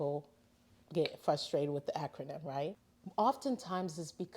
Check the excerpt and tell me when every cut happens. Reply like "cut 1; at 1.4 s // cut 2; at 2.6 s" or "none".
cut 1; at 2.8 s